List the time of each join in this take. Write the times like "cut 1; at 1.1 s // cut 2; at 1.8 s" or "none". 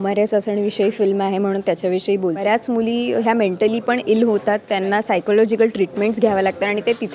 cut 1; at 2.4 s

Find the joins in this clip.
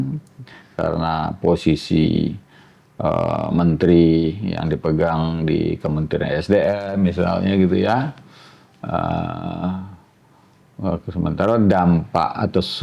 none

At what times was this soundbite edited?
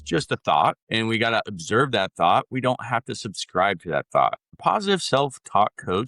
cut 1; at 4.5 s

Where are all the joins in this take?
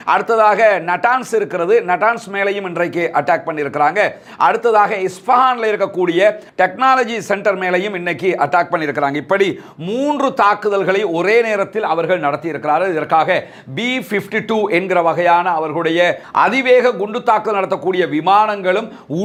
none

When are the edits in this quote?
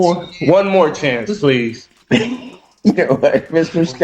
cut 1; at 1.9 s

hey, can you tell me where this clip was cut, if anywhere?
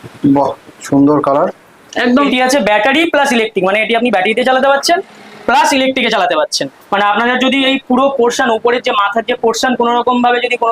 cut 1; at 2.3 s // cut 2; at 6.5 s

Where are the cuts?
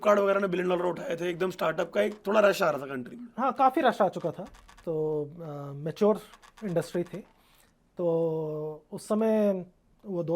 none

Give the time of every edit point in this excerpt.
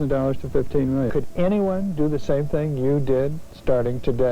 cut 1; at 1.1 s

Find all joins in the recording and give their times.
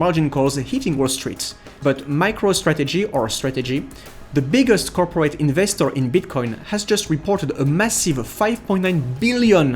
cut 1; at 1.8 s

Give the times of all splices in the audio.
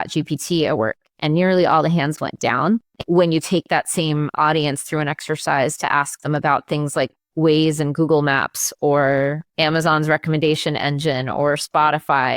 cut 1; at 2.9 s

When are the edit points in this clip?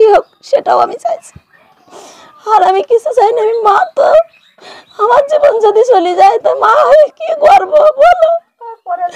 none

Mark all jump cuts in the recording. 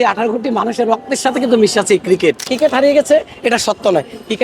cut 1; at 2.5 s

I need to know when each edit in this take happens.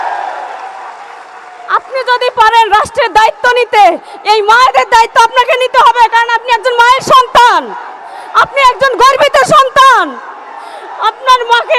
none

